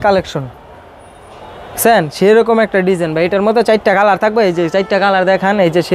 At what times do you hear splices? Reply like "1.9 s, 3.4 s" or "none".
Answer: none

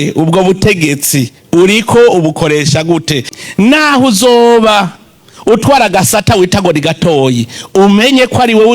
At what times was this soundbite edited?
3.2 s

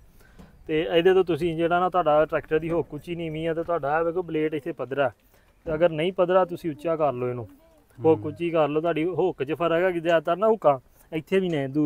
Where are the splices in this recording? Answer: none

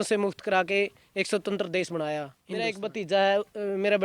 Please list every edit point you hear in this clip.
2.6 s

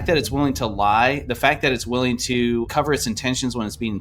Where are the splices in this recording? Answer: 2.7 s

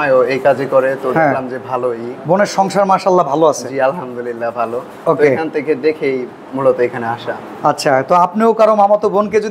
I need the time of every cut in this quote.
none

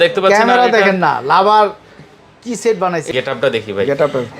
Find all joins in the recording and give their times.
3.1 s

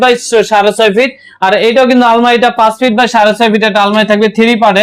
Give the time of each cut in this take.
none

